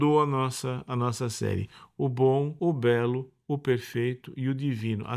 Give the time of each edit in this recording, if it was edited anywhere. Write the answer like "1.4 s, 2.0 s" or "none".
2.5 s

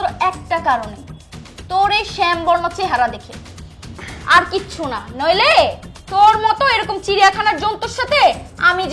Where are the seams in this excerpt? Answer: none

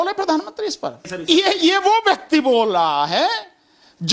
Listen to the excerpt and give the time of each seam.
1.1 s

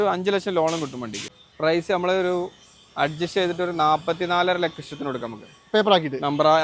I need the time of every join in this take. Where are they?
1.3 s

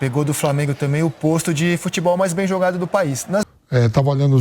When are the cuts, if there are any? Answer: 3.5 s

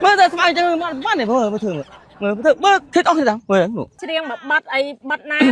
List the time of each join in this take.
4.0 s

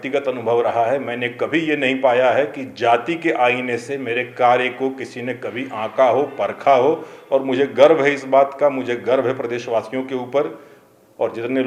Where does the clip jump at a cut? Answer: none

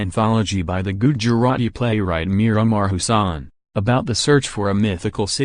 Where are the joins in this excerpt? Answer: 4.0 s

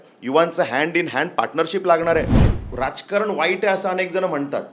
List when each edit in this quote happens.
2.4 s

